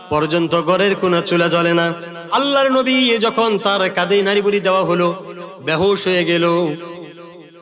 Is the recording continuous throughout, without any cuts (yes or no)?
no